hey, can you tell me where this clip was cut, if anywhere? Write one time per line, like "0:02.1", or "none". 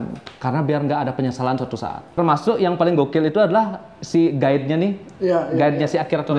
0:02.2